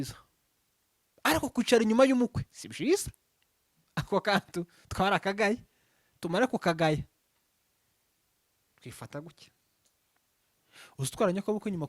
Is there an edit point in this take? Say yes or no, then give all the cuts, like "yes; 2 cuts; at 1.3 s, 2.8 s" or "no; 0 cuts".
yes; 1 cut; at 10.5 s